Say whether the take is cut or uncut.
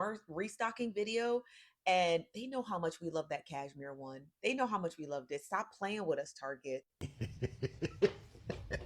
cut